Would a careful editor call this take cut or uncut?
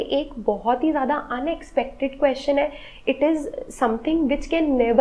uncut